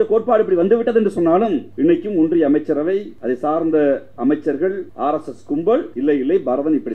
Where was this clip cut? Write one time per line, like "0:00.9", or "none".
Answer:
0:01.7
0:03.1
0:04.9
0:05.9